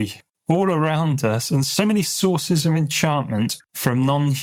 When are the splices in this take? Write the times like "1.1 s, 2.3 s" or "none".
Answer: none